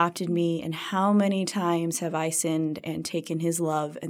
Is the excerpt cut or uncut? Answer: uncut